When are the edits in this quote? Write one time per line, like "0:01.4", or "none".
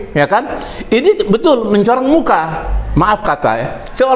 none